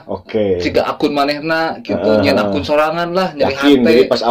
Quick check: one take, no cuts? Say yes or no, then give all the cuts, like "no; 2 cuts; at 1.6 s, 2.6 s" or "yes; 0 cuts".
yes; 0 cuts